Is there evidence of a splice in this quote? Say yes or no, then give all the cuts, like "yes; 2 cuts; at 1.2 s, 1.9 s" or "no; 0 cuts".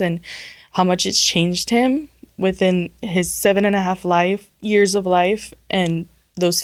no; 0 cuts